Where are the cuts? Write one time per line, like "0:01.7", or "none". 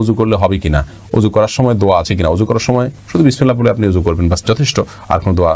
none